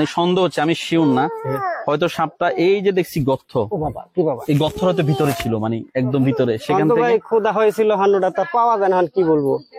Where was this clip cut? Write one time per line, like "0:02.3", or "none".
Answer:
none

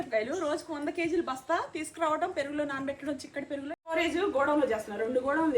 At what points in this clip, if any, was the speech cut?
0:03.9

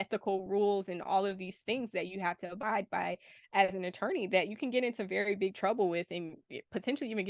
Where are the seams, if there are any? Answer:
none

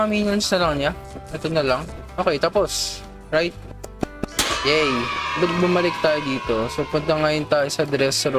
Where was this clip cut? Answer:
none

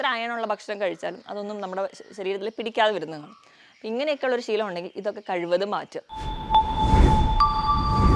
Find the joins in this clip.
0:06.1

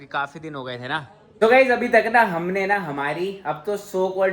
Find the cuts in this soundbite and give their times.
0:01.3

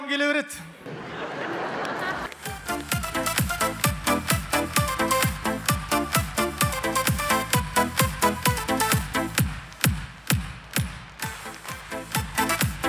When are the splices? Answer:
none

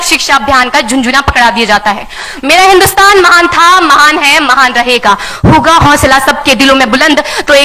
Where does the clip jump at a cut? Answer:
0:02.3

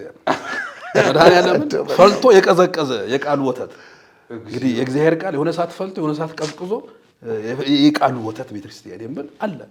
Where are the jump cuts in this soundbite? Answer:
none

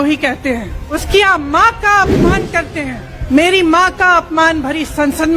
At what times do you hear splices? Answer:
0:01.0
0:03.1

